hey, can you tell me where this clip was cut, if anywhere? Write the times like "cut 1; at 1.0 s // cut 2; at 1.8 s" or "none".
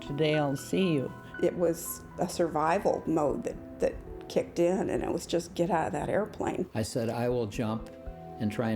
cut 1; at 1.2 s // cut 2; at 6.7 s